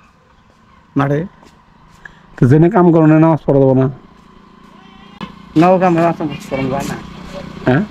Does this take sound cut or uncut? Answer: uncut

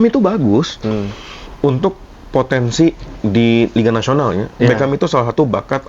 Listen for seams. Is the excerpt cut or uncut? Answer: uncut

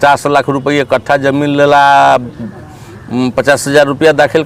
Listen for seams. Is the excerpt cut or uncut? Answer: uncut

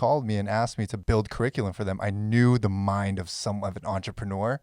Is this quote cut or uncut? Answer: cut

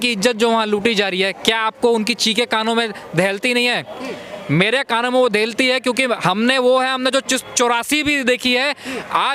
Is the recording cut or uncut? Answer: uncut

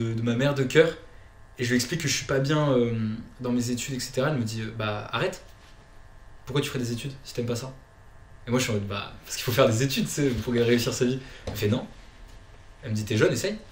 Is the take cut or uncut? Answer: uncut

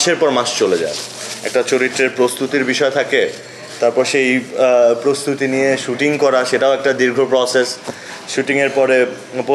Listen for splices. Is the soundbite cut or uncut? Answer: uncut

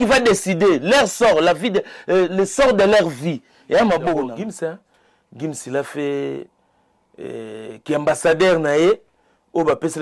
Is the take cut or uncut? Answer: cut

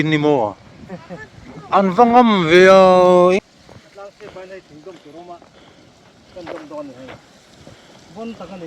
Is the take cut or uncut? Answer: cut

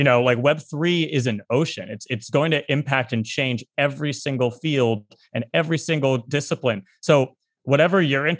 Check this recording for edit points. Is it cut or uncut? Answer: uncut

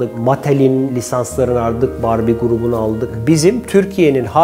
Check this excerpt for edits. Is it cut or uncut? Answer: cut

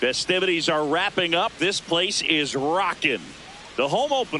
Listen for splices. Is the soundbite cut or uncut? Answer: uncut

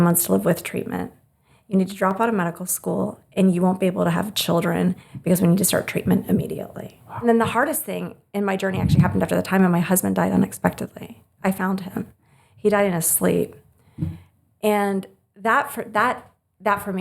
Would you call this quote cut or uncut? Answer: cut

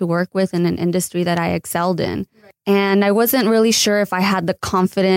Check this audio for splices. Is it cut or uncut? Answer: cut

